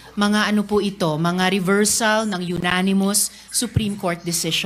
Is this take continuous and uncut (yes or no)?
yes